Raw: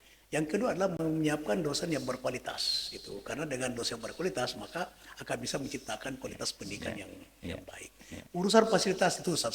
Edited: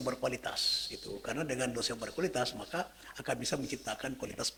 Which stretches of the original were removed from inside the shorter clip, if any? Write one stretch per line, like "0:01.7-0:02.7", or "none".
none